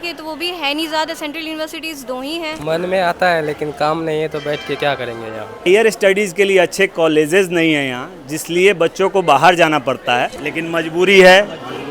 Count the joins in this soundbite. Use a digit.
3